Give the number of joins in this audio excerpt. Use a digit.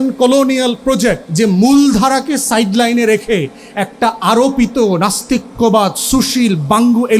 1